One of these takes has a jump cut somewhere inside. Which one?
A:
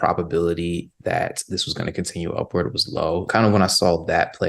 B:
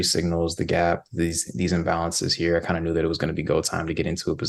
A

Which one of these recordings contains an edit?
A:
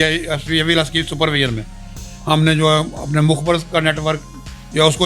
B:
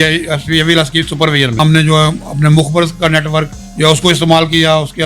B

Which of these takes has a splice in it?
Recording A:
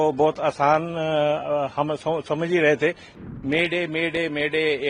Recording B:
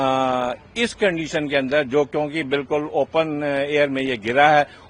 A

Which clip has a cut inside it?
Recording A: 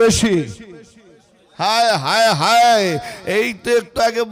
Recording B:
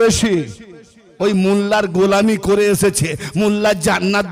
B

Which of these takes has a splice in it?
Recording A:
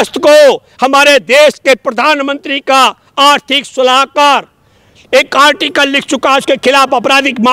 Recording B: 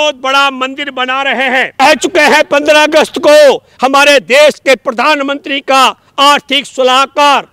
B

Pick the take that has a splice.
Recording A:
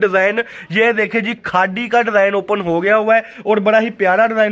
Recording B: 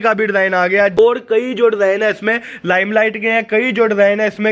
B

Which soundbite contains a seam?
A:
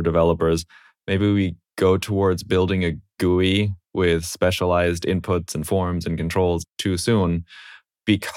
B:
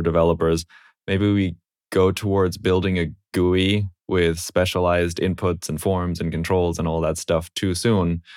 A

